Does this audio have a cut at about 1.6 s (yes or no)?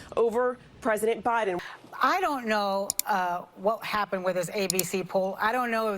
yes